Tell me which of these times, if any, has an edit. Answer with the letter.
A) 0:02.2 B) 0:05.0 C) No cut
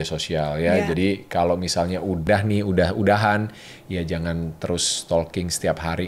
A